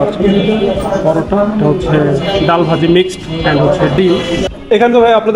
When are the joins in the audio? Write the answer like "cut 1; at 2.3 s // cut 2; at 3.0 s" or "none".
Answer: cut 1; at 4.4 s